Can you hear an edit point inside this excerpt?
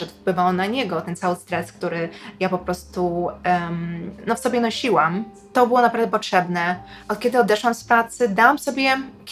no; 0 cuts

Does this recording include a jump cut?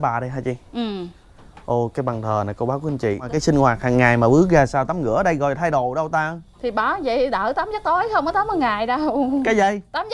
yes; 1 cut; at 3.3 s

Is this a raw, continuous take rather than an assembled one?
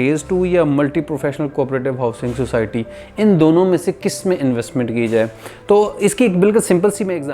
yes; 0 cuts

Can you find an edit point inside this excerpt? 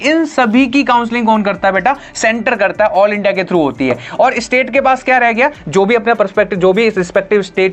no; 0 cuts

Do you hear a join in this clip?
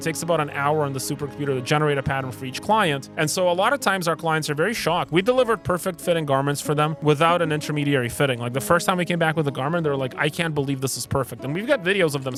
no; 0 cuts

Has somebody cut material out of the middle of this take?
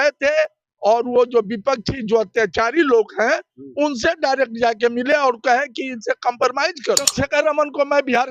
yes; 1 cut; at 7.1 s

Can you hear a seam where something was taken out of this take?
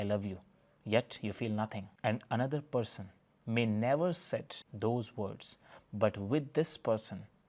no; 0 cuts

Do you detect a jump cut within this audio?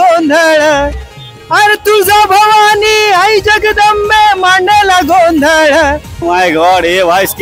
yes; 1 cut; at 6.2 s

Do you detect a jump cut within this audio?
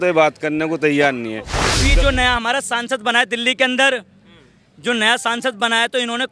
yes; 1 cut; at 1.8 s

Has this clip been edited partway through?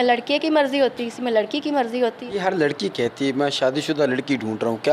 yes; 1 cut; at 2.2 s

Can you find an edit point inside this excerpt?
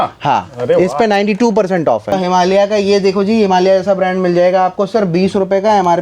yes; 1 cut; at 2.1 s

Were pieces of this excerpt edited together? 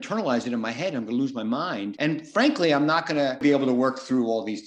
yes; 2 cuts; at 1.9 s, 3.4 s

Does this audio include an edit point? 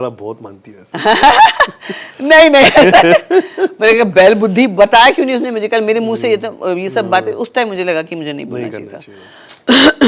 no; 0 cuts

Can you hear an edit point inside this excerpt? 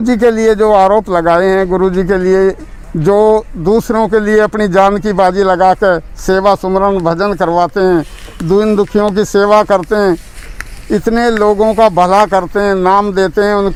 no; 0 cuts

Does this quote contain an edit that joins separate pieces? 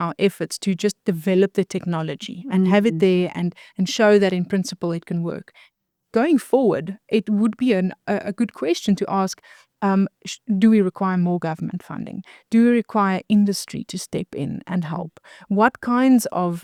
no; 0 cuts

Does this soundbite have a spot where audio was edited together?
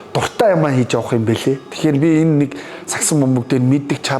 no; 0 cuts

